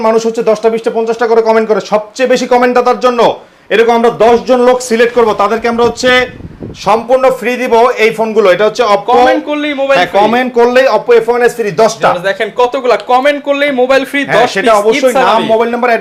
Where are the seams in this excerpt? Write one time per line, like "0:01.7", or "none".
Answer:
none